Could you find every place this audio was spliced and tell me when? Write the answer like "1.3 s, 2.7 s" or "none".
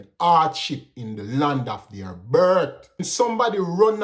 3.1 s